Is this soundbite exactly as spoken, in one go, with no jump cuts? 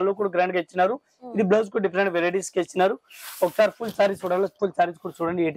yes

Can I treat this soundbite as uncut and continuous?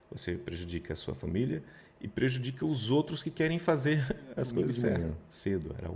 no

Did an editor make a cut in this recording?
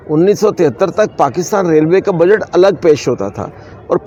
no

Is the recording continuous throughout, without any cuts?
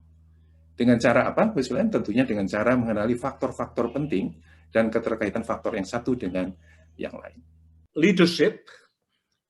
no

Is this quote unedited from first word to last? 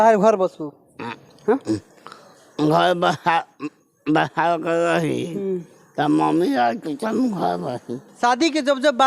no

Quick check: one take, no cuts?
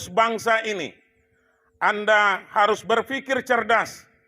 no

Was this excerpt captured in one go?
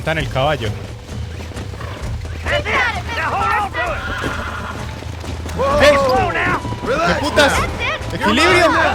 yes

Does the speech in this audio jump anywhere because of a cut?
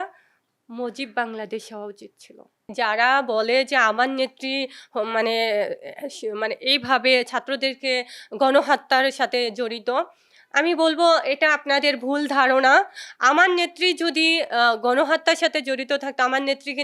yes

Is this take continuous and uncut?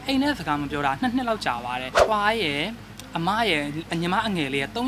no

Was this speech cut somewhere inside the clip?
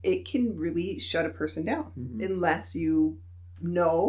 yes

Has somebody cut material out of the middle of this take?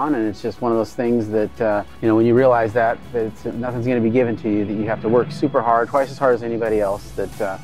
yes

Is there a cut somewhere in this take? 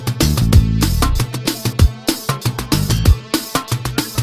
yes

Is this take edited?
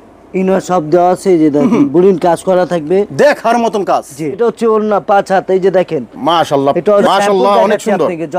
yes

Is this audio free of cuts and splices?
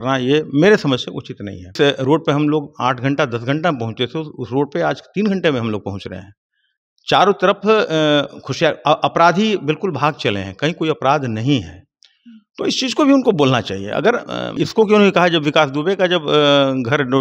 no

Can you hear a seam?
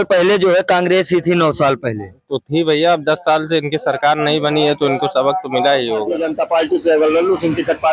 yes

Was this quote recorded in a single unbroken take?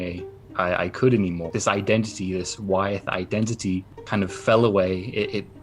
no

